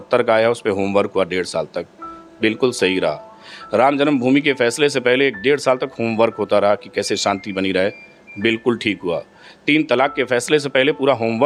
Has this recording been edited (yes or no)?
no